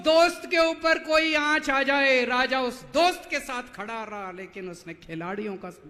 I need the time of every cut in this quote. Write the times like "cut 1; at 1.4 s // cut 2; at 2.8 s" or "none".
none